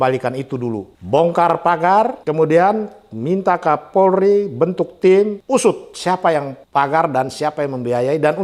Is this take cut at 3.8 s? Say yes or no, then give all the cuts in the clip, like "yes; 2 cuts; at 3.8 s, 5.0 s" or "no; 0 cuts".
no; 4 cuts; at 0.9 s, 2.2 s, 5.4 s, 6.6 s